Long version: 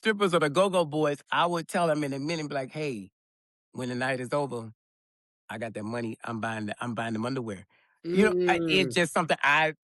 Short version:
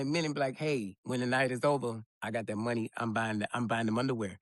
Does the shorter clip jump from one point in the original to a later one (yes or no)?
yes